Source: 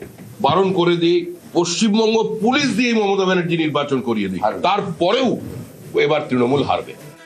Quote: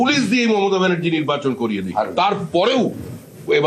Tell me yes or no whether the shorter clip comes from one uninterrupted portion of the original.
yes